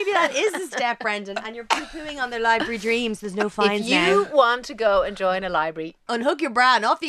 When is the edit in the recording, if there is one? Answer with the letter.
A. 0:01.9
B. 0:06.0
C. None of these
B